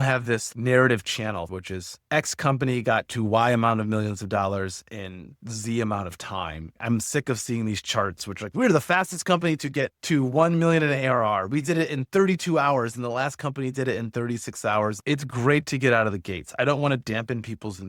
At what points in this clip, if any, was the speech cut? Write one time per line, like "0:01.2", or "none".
0:01.5
0:06.8
0:15.0